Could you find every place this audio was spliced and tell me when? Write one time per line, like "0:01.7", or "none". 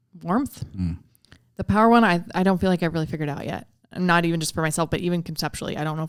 none